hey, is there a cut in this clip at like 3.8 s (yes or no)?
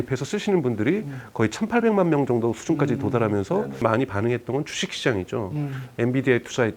yes